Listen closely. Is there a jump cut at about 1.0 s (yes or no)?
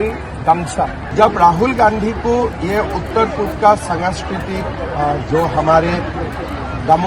yes